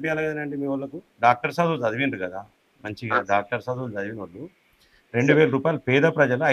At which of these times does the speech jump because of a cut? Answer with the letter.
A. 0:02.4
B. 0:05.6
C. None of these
C